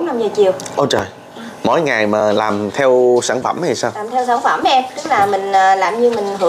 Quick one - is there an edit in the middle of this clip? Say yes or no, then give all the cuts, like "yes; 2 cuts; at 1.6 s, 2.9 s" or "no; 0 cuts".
no; 0 cuts